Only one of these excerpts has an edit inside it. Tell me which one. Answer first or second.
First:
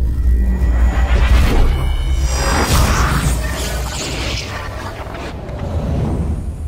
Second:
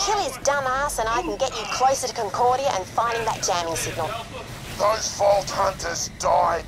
second